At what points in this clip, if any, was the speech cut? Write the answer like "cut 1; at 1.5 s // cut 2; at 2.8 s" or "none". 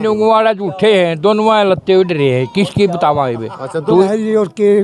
cut 1; at 3.9 s